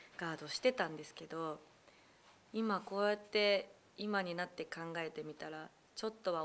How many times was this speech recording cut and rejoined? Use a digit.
0